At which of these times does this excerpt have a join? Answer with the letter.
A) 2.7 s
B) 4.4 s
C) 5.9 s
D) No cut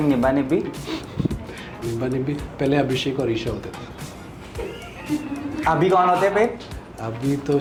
D